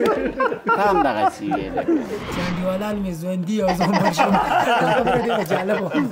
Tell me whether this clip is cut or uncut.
cut